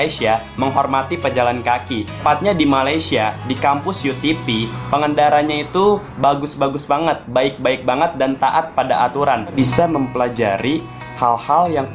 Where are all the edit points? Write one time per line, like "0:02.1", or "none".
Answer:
0:02.2
0:09.5

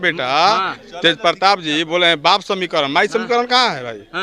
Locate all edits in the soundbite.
none

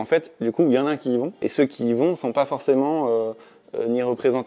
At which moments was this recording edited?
0:01.4

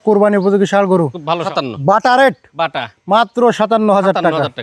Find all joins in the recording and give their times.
0:01.5

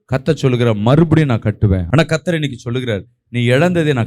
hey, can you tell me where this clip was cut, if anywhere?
0:01.8

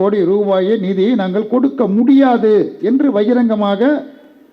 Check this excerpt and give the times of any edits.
none

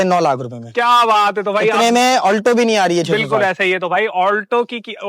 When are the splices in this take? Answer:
none

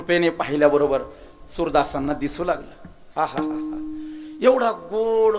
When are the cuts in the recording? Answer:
none

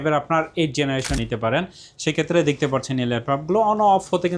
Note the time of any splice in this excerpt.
0:01.2

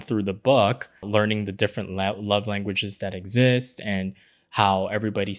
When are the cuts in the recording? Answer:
0:01.1

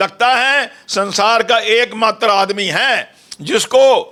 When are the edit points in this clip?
none

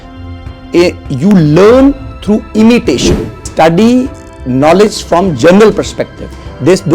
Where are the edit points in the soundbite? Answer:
0:03.5

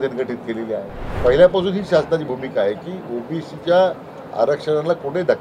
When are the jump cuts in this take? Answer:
0:01.0

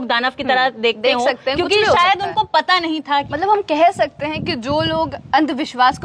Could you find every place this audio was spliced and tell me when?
0:03.3

